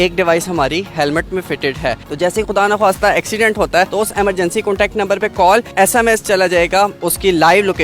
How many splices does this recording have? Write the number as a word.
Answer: four